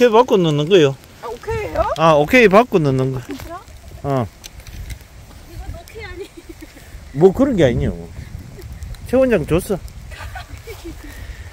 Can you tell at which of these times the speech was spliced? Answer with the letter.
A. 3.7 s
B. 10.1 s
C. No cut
C